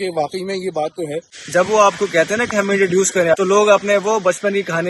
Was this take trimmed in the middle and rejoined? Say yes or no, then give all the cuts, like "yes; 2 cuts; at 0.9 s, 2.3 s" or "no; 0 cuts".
yes; 2 cuts; at 1.3 s, 3.4 s